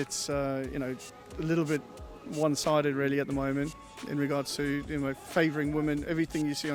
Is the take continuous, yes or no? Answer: yes